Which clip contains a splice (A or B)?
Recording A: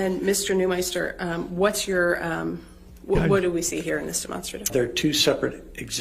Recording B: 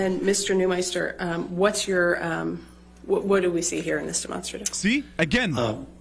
A